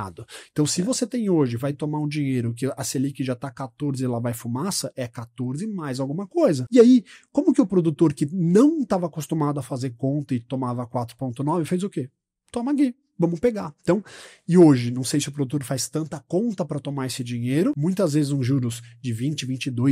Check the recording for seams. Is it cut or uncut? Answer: cut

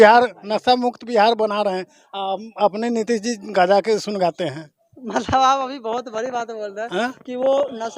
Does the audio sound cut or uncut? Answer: uncut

